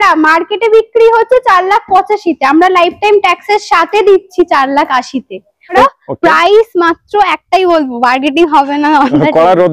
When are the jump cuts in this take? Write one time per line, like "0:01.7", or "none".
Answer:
0:05.8